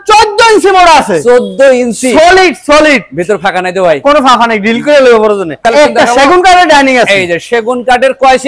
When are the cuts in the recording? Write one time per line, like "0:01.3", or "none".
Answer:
0:05.6